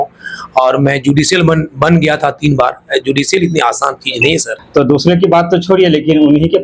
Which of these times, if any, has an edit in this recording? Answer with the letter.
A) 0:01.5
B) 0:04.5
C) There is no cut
B